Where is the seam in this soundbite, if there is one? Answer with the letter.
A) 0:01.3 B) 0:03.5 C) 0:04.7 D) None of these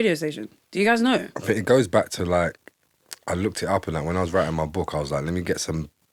D